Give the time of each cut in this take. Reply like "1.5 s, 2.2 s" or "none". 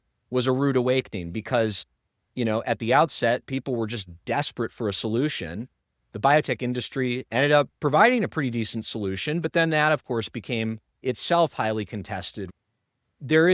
12.5 s